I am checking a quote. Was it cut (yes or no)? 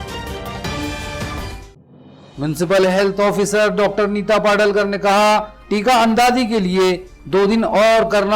yes